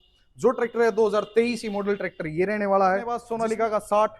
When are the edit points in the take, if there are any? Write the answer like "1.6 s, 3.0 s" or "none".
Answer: 3.2 s